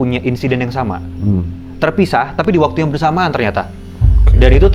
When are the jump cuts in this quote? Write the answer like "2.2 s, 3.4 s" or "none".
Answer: none